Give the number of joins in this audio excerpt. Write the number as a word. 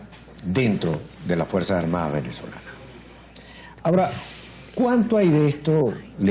one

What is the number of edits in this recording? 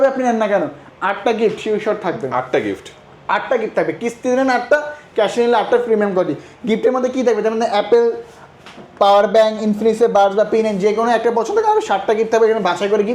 zero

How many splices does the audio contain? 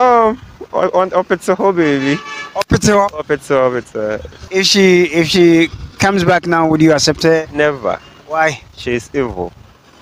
one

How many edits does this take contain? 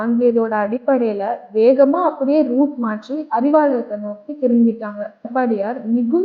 one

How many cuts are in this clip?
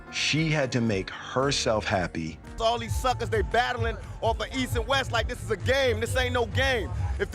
one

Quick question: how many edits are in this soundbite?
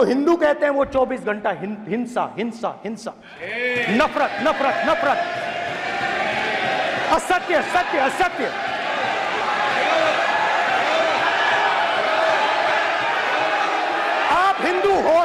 zero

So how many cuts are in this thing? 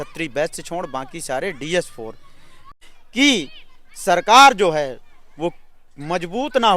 one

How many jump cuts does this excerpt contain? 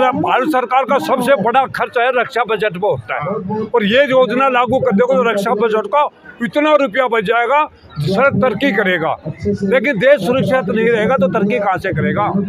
zero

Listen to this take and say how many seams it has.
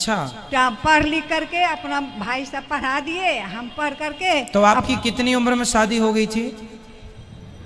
zero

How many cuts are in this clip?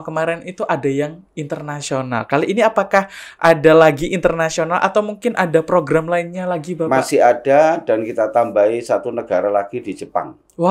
zero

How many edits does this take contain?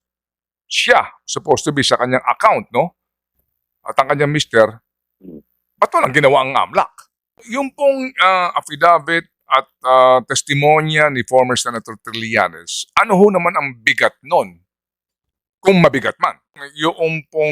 two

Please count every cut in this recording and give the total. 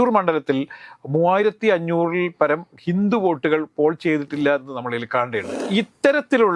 one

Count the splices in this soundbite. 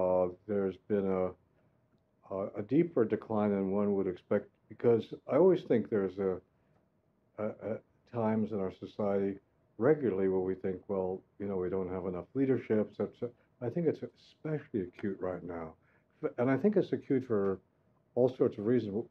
one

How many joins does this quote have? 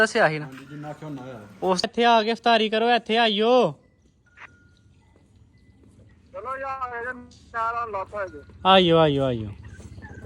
one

